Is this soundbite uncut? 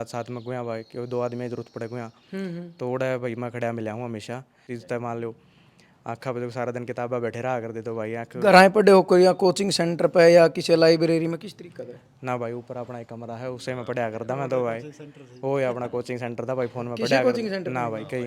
no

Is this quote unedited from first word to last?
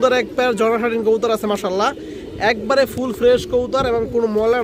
yes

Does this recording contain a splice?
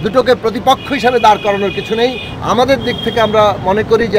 yes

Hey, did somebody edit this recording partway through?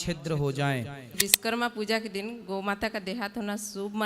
yes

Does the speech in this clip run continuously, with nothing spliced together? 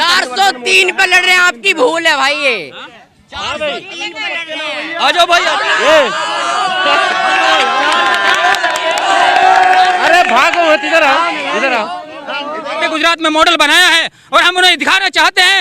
no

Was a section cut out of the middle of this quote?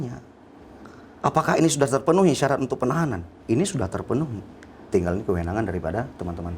yes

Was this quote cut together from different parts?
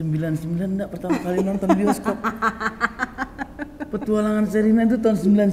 no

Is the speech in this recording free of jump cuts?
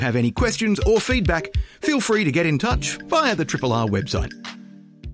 no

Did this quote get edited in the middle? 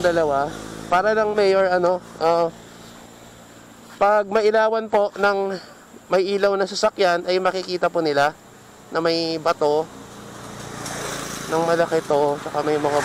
no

